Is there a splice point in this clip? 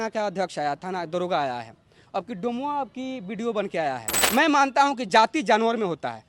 yes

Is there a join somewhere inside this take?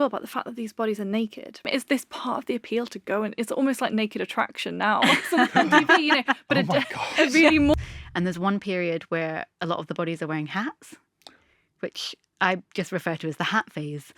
yes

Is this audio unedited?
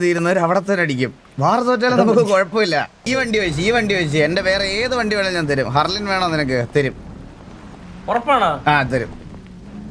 no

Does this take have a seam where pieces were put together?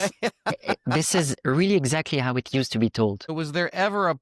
yes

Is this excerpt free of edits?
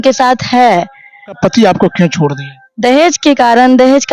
no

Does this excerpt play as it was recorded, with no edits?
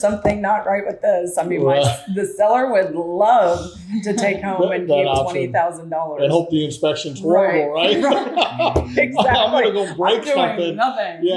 yes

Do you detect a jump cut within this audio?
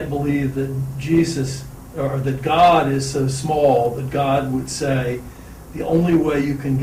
no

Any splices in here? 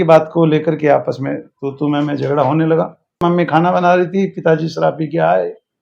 yes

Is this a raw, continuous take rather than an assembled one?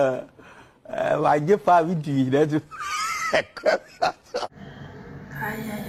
yes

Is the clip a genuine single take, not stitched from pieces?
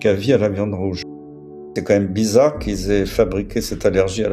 no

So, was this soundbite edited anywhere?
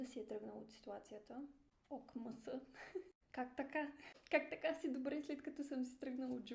yes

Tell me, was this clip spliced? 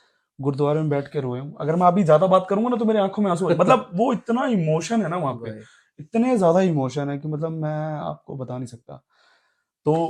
no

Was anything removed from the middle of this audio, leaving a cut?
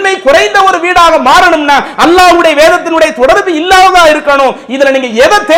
no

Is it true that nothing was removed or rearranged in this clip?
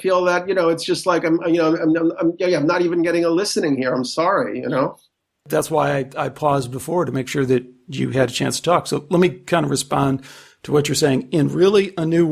no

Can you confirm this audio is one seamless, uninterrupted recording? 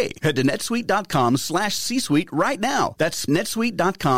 no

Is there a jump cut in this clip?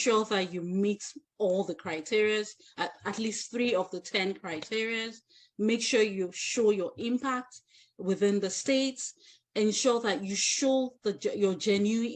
no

